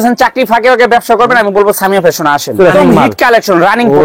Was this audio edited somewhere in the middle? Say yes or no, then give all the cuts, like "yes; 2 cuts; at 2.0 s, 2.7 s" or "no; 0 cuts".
yes; 1 cut; at 2.7 s